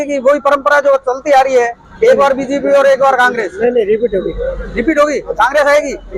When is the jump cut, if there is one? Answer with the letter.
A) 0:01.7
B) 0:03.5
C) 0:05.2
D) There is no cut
D